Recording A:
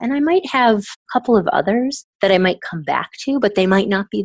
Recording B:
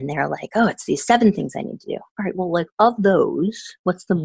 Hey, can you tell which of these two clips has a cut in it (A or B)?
A